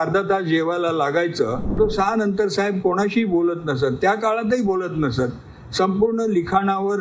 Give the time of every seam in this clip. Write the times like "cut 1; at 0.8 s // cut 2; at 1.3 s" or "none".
cut 1; at 1.7 s

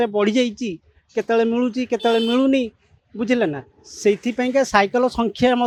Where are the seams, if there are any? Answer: none

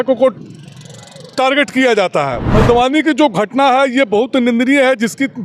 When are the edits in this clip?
cut 1; at 2.4 s

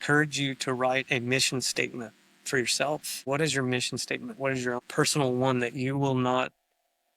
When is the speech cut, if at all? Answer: cut 1; at 3.1 s // cut 2; at 4.8 s

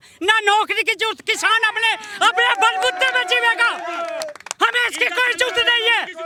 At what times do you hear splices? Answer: none

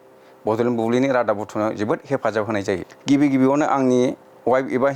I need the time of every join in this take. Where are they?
cut 1; at 2.9 s

